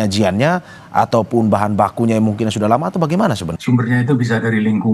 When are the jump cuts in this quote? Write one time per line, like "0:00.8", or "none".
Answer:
0:03.5